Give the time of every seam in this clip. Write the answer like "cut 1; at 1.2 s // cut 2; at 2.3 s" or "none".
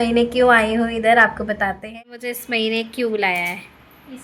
cut 1; at 1.9 s